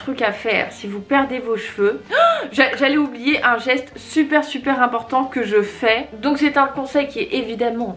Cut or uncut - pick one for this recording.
cut